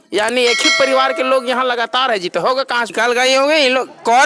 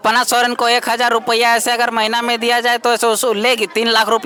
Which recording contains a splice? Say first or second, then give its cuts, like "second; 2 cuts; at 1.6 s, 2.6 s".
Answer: first; 1 cut; at 2.9 s